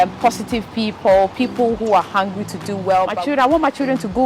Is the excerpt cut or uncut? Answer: cut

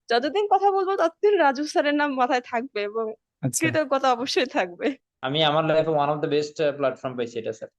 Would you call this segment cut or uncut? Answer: cut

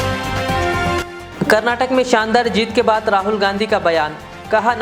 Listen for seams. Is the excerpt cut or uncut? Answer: uncut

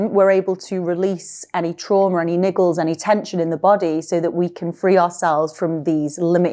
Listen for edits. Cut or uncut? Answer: uncut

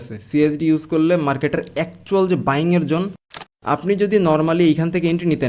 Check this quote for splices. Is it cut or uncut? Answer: cut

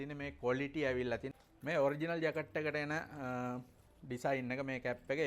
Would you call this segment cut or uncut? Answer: cut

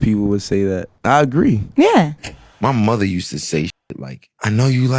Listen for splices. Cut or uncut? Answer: cut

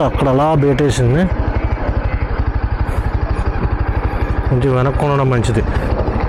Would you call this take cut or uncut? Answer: uncut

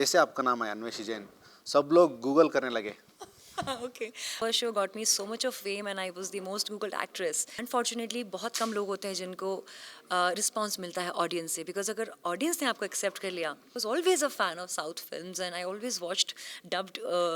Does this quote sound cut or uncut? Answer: cut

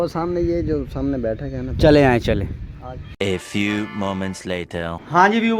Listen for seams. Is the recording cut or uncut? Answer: uncut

